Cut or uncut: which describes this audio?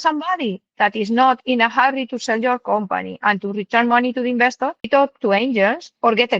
cut